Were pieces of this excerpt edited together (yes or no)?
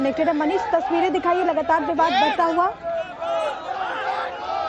yes